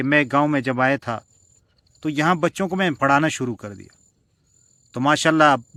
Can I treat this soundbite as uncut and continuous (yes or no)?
yes